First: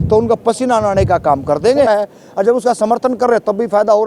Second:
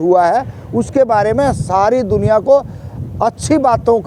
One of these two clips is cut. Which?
first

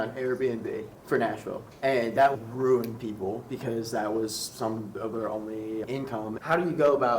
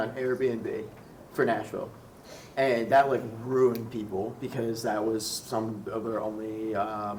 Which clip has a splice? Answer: first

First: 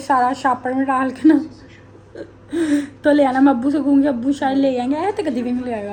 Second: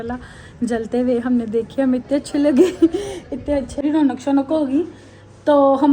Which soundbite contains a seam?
second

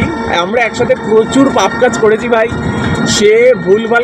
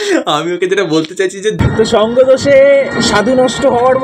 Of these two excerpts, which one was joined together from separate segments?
second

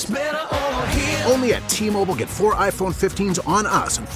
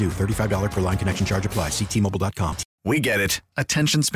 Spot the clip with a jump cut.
second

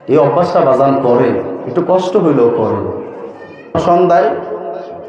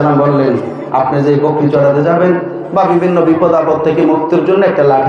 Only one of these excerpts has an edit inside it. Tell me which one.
first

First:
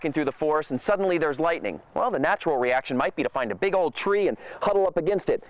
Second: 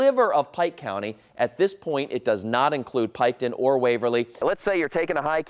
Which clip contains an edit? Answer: second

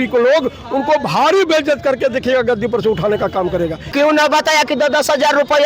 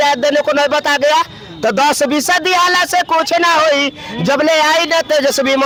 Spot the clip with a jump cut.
first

